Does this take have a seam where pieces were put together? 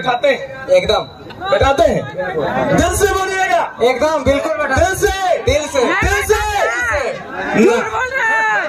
no; 0 cuts

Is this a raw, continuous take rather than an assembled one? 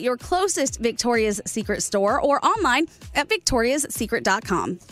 yes; 0 cuts

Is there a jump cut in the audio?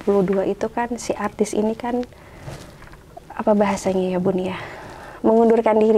no; 0 cuts

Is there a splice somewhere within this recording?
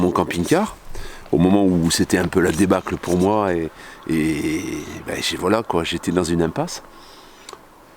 no; 0 cuts

